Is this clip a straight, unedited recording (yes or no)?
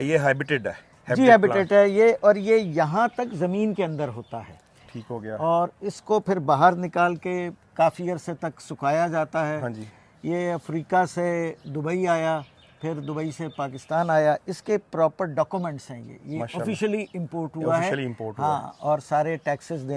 yes